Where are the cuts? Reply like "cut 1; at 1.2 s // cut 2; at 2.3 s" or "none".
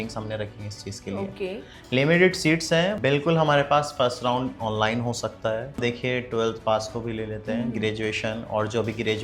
cut 1; at 3.0 s // cut 2; at 5.8 s